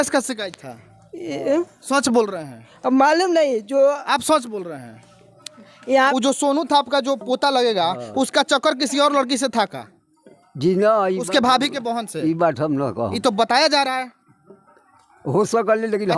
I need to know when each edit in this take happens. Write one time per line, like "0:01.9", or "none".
0:06.1